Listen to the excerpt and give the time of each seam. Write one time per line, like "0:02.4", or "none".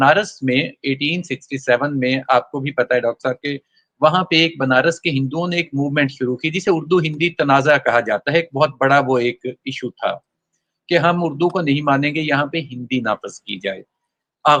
none